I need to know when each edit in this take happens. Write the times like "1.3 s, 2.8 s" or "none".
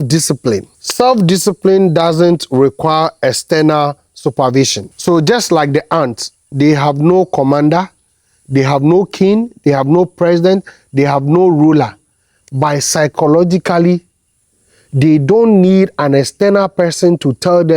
none